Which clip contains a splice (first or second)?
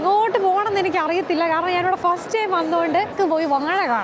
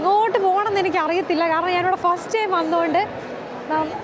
first